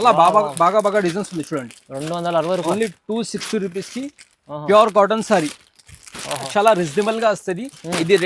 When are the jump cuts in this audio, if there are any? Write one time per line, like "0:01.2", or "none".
0:06.5